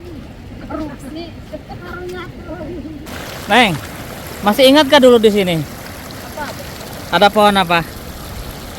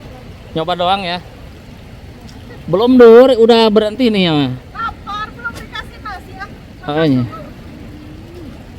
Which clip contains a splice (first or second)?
first